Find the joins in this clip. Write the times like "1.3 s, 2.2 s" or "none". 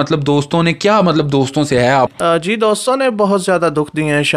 2.1 s